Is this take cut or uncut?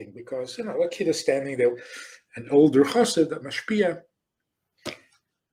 uncut